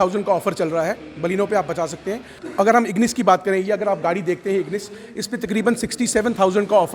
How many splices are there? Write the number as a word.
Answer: one